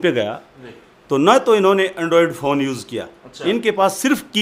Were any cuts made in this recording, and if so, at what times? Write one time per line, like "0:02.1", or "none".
none